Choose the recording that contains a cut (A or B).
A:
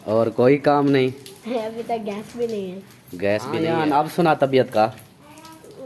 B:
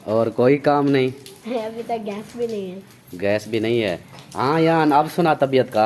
A